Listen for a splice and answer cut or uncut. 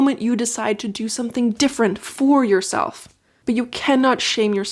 uncut